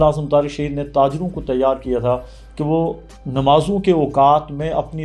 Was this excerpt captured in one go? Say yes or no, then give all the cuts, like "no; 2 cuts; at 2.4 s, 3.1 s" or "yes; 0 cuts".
yes; 0 cuts